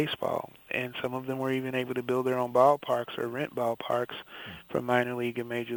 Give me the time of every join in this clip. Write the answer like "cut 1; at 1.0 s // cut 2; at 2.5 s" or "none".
none

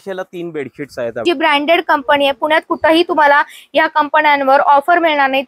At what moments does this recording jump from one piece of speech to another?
cut 1; at 1.2 s

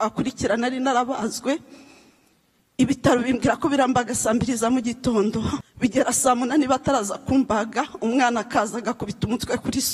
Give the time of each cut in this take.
cut 1; at 5.7 s

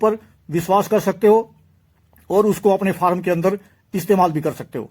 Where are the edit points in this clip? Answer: none

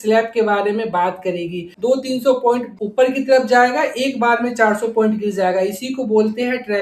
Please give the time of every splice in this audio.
cut 1; at 1.7 s

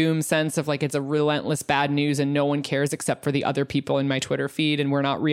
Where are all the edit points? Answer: none

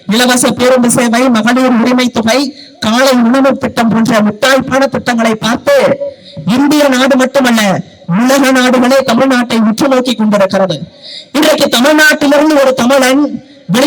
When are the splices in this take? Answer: none

